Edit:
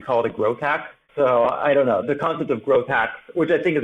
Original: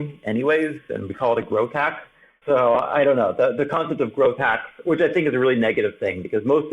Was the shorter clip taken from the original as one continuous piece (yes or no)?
no